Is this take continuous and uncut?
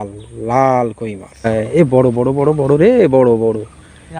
no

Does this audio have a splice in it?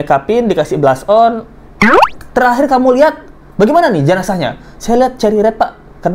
no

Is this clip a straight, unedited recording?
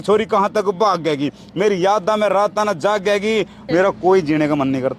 no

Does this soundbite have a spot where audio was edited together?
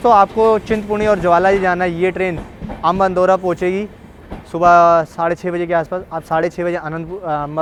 no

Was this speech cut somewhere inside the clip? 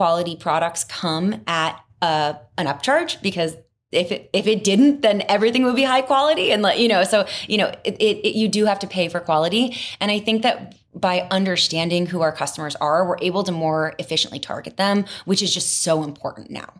no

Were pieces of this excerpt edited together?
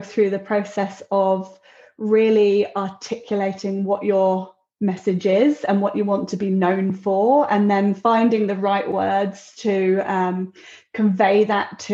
no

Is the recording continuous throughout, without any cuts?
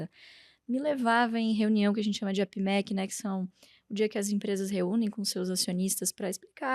yes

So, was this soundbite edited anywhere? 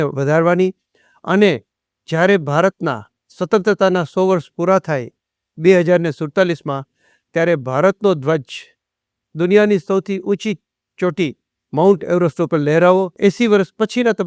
yes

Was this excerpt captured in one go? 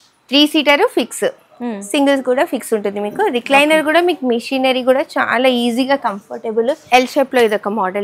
no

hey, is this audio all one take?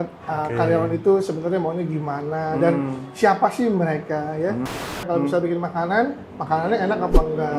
no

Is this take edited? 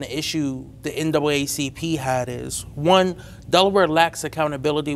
no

